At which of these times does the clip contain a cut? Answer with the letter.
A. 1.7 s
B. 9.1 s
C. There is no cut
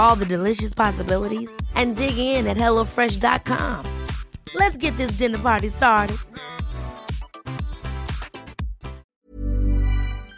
B